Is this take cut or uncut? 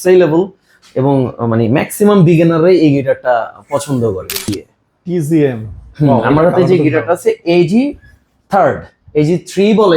cut